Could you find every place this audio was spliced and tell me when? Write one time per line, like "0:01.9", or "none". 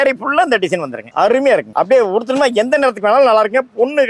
0:01.0
0:01.7